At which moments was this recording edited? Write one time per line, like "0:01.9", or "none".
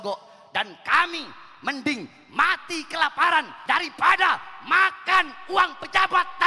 0:03.5